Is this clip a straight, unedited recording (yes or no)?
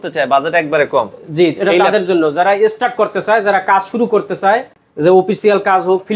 yes